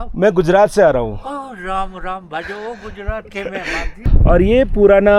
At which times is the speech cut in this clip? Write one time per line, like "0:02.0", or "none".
0:04.1